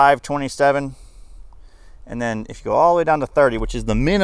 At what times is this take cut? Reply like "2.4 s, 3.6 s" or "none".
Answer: none